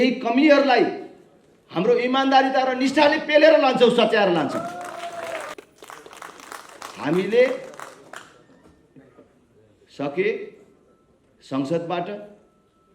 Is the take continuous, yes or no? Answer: no